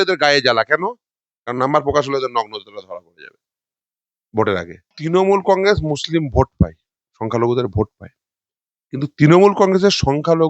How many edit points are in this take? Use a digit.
1